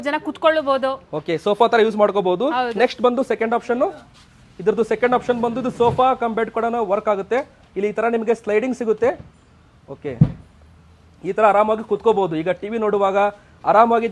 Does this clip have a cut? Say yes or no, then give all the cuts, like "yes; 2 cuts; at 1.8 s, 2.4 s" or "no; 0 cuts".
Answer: no; 0 cuts